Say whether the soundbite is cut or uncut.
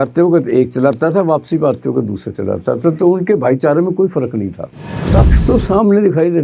cut